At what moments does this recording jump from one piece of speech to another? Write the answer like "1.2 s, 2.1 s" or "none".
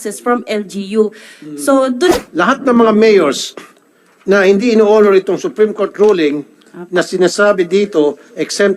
2.1 s